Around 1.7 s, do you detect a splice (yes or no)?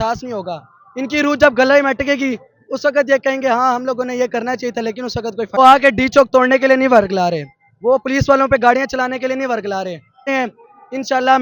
no